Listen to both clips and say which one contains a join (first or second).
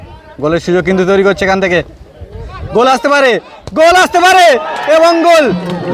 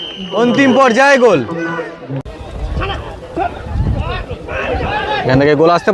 second